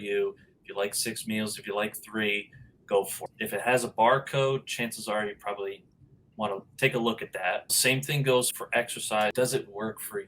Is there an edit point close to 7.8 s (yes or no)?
no